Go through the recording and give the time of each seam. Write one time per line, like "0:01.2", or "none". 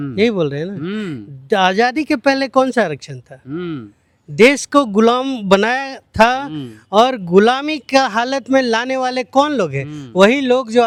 none